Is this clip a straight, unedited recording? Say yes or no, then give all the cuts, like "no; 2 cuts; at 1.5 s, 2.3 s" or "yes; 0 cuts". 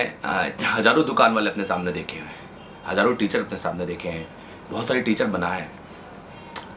yes; 0 cuts